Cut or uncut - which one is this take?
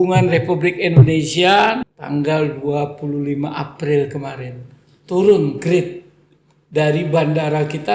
cut